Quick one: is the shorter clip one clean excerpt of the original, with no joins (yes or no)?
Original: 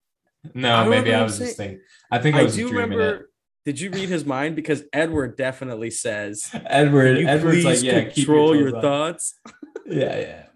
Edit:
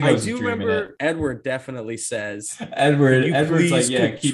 no